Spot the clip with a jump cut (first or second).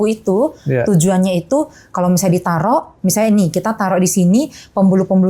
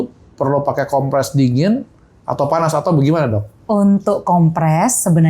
second